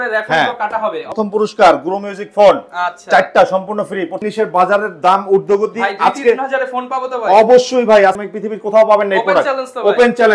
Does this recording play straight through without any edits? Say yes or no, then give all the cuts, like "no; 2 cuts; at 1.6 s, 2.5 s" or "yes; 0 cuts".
no; 3 cuts; at 1.1 s, 4.2 s, 8.2 s